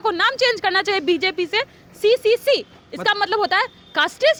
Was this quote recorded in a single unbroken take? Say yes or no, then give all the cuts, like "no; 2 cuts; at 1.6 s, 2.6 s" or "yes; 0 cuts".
yes; 0 cuts